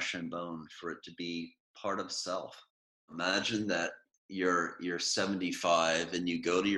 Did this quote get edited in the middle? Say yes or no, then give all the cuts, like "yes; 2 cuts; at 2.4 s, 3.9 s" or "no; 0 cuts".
yes; 2 cuts; at 1.6 s, 3.1 s